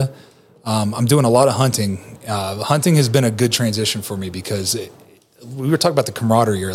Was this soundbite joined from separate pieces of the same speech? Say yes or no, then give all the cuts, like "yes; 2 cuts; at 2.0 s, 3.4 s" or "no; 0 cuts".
no; 0 cuts